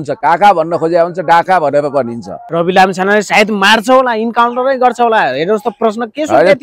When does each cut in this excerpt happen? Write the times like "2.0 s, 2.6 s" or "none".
2.4 s